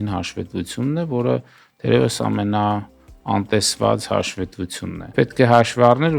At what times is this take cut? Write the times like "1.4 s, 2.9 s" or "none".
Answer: 5.1 s